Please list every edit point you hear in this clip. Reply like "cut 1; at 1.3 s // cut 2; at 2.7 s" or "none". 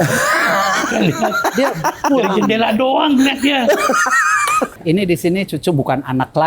cut 1; at 4.7 s